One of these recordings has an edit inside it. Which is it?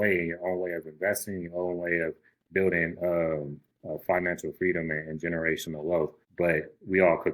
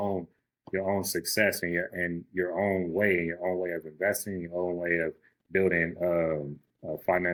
first; 1 cut; at 6.2 s

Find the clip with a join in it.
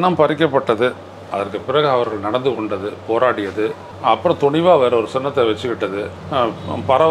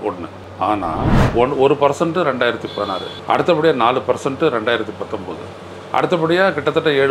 second; 1 cut; at 1.2 s

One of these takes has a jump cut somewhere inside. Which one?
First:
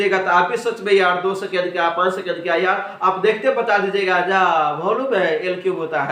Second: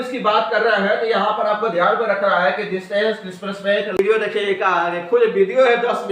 second; 1 cut; at 4.0 s

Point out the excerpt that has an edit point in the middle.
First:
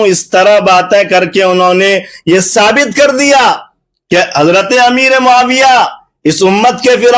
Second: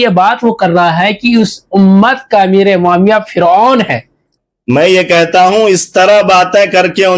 second; 1 cut; at 4.3 s

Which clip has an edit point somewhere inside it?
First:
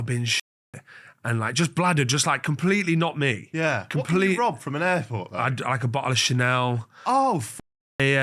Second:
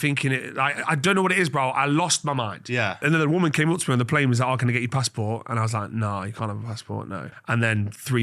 second; 2 cuts; at 3.0 s, 7.4 s

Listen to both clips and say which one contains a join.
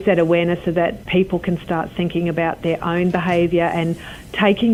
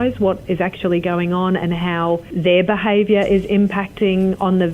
second; 1 cut; at 2.3 s

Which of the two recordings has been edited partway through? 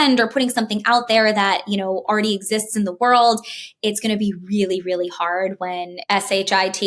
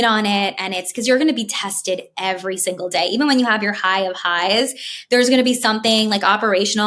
first; 1 cut; at 6.0 s

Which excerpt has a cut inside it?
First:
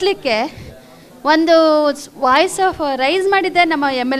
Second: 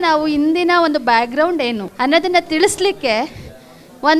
second; 1 cut; at 1.9 s

